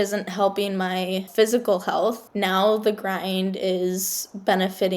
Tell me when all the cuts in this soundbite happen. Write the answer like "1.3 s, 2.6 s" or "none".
1.3 s, 2.3 s